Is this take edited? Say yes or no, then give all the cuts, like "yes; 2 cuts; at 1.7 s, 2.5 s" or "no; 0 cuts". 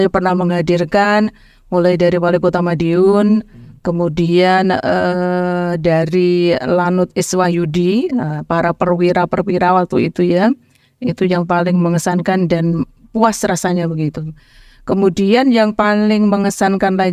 no; 0 cuts